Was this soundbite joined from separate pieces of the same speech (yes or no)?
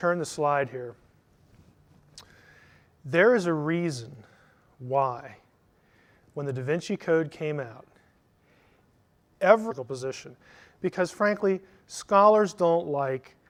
no